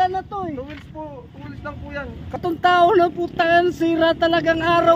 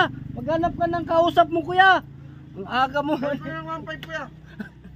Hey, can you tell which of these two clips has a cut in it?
first; 1 cut; at 2.4 s

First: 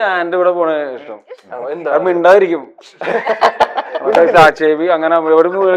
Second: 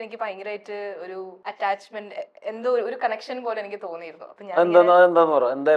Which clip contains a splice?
second; 1 cut; at 1.4 s

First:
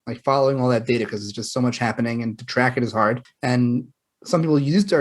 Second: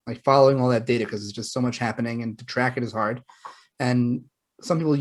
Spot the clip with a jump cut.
first; 1 cut; at 3.3 s

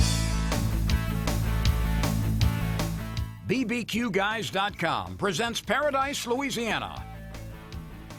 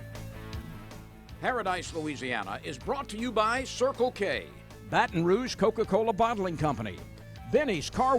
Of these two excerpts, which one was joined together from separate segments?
second; 1 cut; at 1.0 s

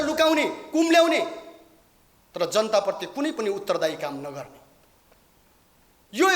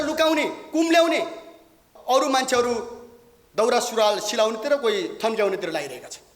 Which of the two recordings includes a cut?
second; 1 cut; at 1.9 s

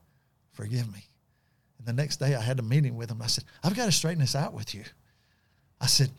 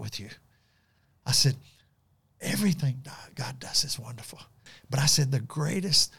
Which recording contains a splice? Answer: second; 1 cut; at 4.6 s

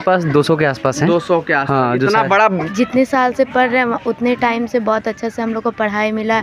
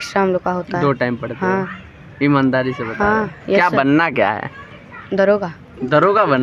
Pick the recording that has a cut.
first; 1 cut; at 2.7 s

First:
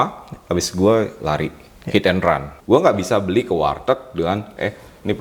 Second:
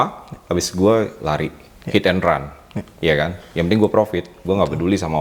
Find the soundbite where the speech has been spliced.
first; 1 cut; at 2.5 s

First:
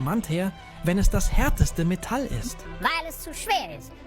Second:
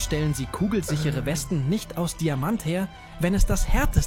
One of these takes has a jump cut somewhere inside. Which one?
first; 1 cut; at 2.6 s

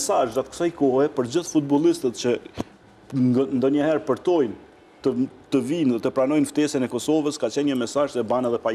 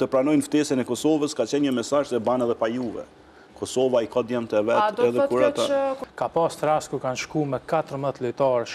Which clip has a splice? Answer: second; 1 cut; at 6.1 s

